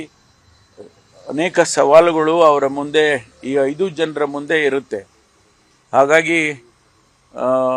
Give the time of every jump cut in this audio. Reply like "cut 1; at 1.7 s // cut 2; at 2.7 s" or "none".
cut 1; at 5.3 s